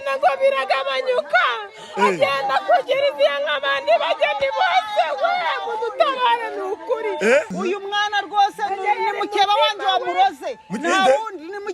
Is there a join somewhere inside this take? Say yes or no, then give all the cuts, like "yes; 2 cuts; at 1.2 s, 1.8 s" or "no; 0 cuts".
yes; 1 cut; at 7.5 s